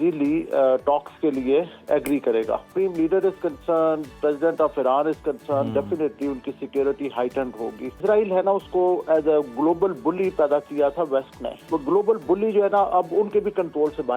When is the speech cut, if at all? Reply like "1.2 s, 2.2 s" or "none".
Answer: 2.7 s, 8.0 s, 11.7 s